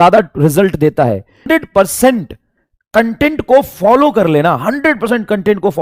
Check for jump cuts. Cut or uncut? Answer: cut